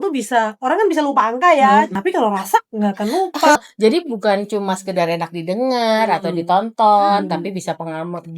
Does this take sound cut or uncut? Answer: cut